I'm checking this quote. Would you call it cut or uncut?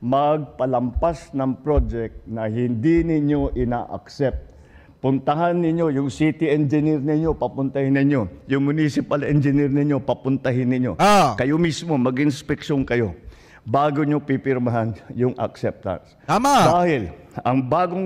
uncut